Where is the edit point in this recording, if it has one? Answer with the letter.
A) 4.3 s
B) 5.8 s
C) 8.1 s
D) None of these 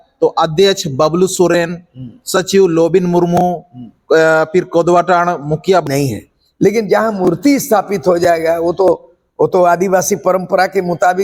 B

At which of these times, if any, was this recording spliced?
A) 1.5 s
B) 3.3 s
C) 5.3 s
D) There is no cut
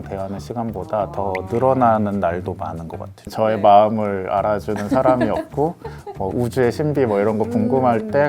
B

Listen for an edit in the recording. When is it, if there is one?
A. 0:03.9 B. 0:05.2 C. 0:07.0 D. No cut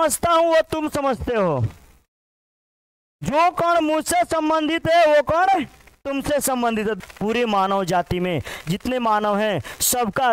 C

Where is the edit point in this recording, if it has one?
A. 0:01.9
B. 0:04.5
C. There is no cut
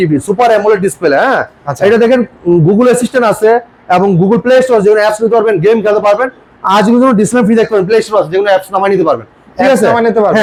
C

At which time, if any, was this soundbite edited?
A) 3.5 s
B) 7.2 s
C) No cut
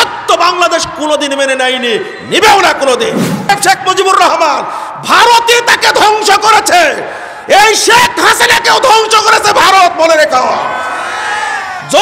A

